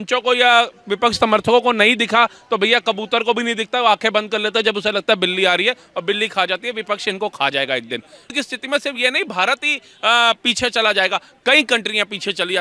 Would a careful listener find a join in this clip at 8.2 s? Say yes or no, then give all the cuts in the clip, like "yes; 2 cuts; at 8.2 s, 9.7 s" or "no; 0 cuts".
yes; 1 cut; at 8.2 s